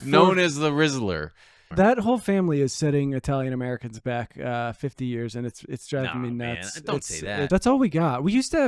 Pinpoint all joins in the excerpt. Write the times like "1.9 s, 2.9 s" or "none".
1.7 s, 7.5 s